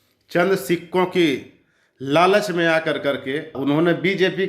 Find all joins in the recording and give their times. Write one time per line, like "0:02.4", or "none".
0:03.6